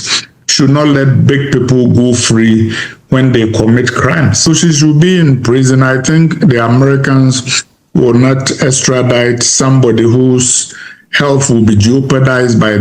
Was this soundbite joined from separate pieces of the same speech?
yes; 1 cut; at 4.5 s

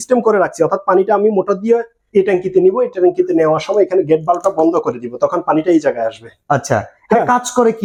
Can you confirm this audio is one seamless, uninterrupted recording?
yes; 0 cuts

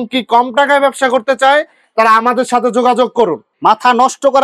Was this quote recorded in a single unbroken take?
no; 1 cut; at 3.4 s

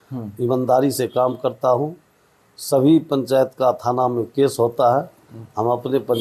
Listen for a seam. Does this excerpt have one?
no; 0 cuts

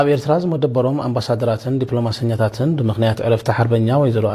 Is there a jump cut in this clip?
no; 0 cuts

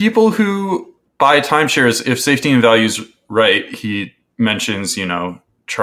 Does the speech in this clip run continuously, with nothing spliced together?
no; 1 cut; at 1.0 s

